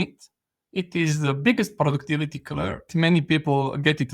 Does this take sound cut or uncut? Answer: cut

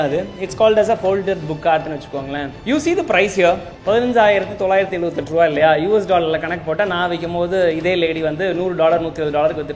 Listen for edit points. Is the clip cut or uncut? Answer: cut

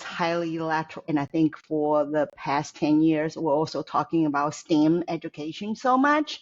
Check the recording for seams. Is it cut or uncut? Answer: cut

